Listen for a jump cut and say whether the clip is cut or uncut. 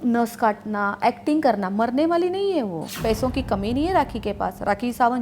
cut